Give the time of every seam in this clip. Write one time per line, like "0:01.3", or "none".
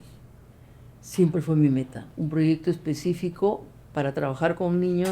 0:02.0